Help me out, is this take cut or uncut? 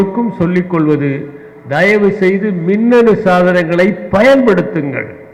uncut